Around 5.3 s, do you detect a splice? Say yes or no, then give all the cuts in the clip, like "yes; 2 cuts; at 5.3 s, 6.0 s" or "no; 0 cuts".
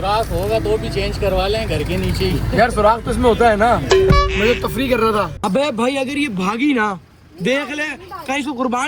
yes; 1 cut; at 5.3 s